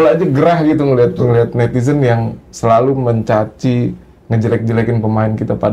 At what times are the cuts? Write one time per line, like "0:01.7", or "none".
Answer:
none